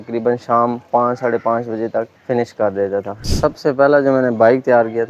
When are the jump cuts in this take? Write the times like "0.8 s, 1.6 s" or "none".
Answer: 2.2 s, 3.3 s